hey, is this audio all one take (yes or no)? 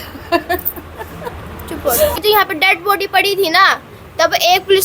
no